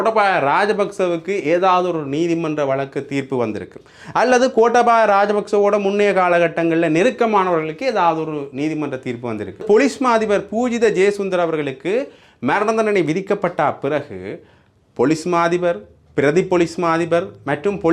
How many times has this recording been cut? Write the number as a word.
one